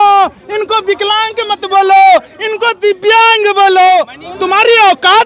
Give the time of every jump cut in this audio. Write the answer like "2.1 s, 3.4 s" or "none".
4.2 s